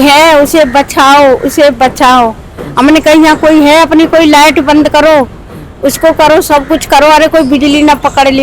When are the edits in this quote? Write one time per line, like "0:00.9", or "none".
none